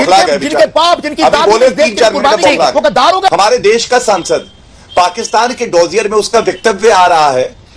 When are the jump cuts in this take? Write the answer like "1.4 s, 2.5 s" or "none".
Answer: 3.3 s